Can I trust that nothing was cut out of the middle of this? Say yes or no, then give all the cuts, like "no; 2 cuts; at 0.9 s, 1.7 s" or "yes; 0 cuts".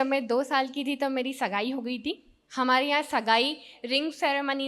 yes; 0 cuts